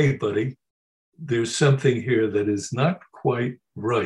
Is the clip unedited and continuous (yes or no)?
yes